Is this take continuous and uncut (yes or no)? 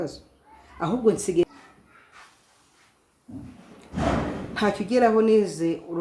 no